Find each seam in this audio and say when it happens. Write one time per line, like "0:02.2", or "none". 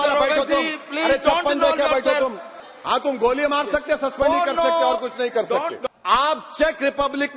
0:02.6
0:05.8